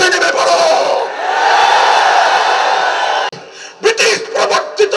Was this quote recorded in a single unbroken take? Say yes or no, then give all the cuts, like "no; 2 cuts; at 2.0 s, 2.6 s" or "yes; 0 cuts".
no; 1 cut; at 3.3 s